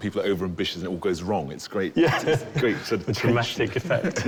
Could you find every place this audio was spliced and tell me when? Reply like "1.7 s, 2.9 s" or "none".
none